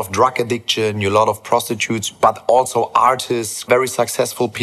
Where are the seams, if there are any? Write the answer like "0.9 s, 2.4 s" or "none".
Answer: 3.7 s